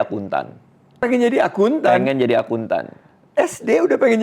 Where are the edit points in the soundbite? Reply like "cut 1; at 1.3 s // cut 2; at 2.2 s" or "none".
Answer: cut 1; at 1.0 s